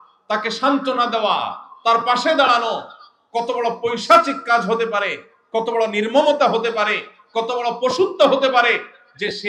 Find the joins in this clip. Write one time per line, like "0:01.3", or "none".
none